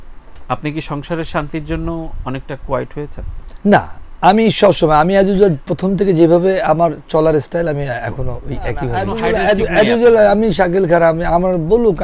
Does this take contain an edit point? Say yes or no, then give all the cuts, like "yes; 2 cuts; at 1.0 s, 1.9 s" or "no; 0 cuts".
yes; 1 cut; at 9.1 s